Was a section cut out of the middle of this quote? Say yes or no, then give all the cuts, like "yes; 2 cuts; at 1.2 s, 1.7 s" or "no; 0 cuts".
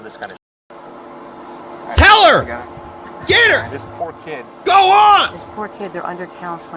no; 0 cuts